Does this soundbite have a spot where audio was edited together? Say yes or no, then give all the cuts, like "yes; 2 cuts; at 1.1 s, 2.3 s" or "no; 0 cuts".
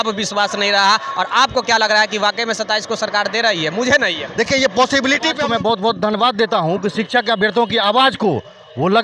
yes; 1 cut; at 5.4 s